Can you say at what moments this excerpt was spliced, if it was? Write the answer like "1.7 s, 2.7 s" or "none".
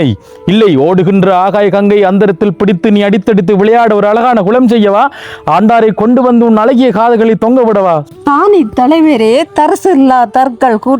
8.1 s